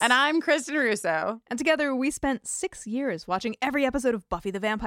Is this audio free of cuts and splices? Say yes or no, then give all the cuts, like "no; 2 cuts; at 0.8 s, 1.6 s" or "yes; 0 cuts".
yes; 0 cuts